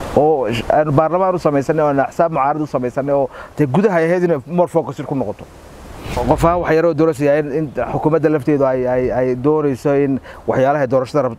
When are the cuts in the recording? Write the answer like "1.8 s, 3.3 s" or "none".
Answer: 6.2 s